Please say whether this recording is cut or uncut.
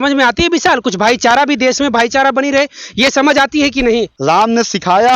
cut